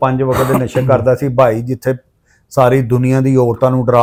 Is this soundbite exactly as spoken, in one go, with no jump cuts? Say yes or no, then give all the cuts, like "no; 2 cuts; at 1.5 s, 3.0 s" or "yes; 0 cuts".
yes; 0 cuts